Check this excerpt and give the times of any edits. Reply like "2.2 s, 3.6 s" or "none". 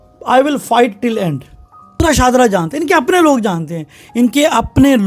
1.9 s